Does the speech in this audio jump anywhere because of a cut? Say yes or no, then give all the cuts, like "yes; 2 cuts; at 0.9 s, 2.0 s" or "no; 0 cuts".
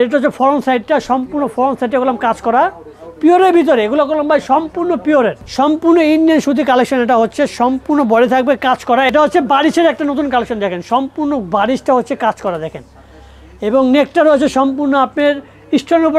yes; 2 cuts; at 5.4 s, 9.1 s